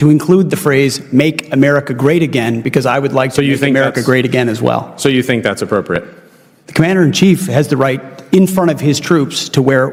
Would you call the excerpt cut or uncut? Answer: uncut